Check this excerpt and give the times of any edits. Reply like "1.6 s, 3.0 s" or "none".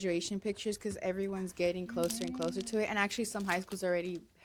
none